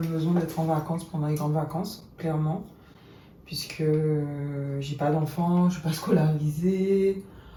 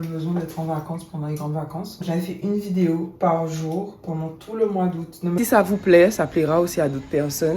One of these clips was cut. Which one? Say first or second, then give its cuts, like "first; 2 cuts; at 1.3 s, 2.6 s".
second; 2 cuts; at 2.0 s, 5.4 s